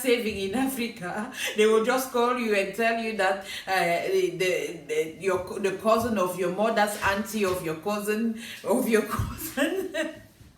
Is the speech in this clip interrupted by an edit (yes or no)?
no